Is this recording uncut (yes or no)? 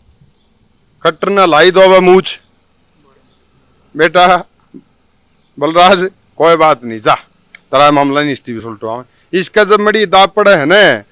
yes